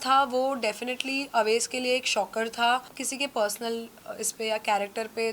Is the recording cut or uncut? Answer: cut